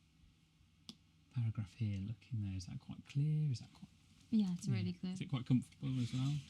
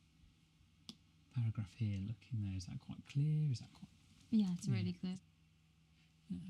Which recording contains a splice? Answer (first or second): second